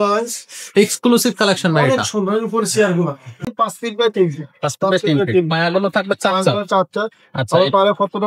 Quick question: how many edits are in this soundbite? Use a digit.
1